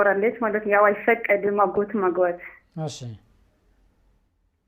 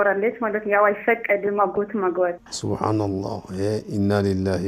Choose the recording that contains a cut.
second; 1 cut; at 2.5 s

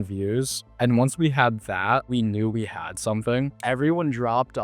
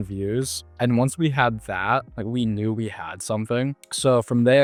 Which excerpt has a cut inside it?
first; 2 cuts; at 2.1 s, 3.6 s

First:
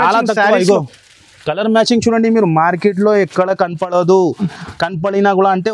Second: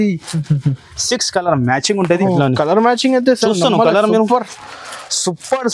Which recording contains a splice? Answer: second; 1 cut; at 2.2 s

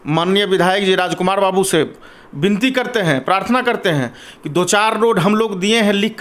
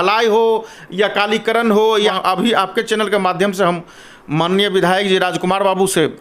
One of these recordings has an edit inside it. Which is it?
second; 1 cut; at 2.2 s

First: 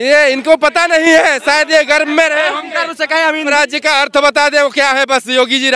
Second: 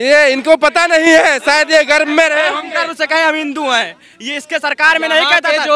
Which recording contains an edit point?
first; 1 cut; at 3.5 s

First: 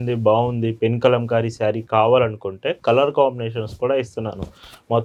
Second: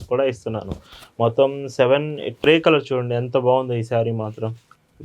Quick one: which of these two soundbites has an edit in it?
second; 1 cut; at 2.5 s

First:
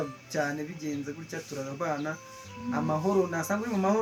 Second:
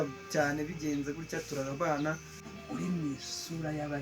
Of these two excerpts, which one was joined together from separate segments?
second; 1 cut; at 2.4 s

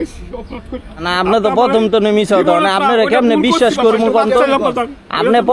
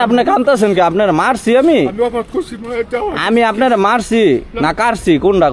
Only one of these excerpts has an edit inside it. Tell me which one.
first; 1 cut; at 1.0 s

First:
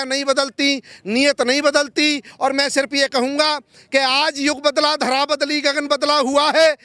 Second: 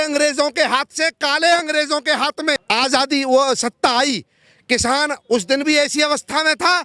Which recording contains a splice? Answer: second; 1 cut; at 2.6 s

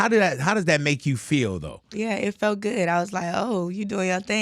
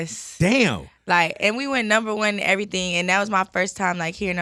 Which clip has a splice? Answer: first; 1 cut; at 1.9 s

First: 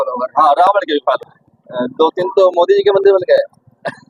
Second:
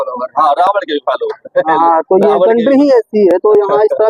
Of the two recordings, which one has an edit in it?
first; 1 cut; at 1.3 s

